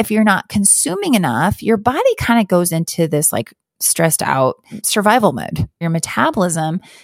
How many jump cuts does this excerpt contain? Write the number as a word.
two